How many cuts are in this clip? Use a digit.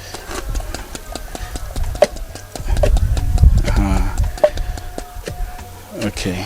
1